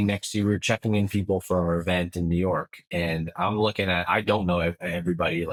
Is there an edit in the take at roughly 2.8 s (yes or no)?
no